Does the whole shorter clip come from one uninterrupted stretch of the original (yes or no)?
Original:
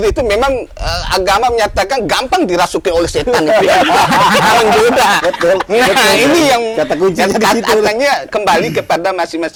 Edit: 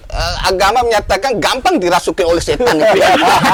yes